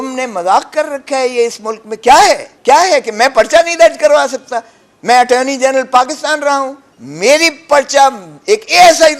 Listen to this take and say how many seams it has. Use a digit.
2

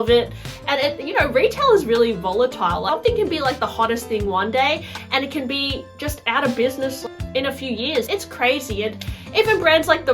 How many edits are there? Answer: 3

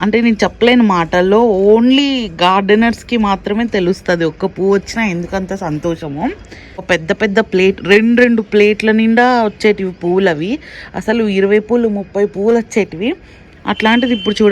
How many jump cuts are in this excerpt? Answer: 1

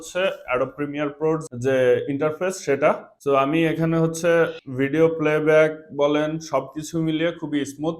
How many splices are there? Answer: 3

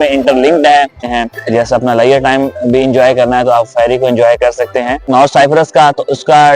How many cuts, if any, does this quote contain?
2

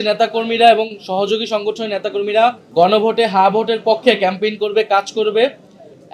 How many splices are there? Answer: 1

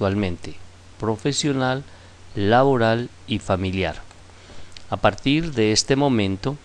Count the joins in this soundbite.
1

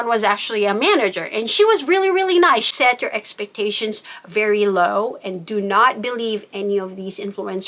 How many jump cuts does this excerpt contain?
1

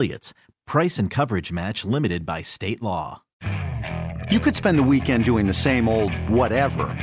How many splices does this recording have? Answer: 1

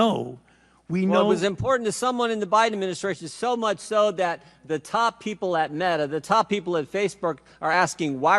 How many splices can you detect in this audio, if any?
0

